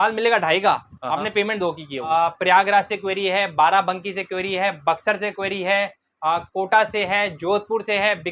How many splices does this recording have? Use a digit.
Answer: 1